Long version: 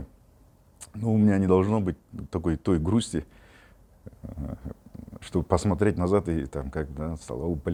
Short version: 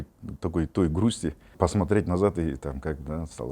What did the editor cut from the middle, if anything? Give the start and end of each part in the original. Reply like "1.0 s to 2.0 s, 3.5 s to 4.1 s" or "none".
3.5 s to 5.5 s